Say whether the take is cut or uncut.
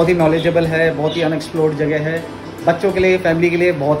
uncut